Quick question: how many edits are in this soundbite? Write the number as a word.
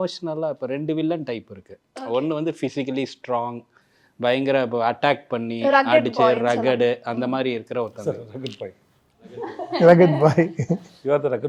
zero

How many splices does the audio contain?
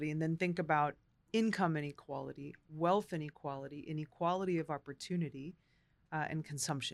one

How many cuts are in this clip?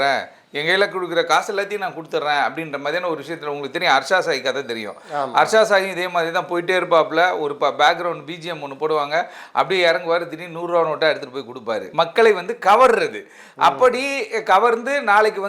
one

